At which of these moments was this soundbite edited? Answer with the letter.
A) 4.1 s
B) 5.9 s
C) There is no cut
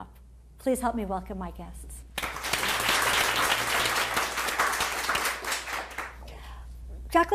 A